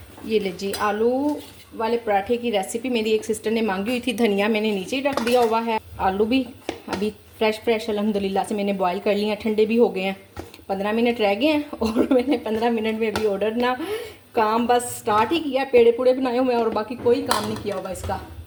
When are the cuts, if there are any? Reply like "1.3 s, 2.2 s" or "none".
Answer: none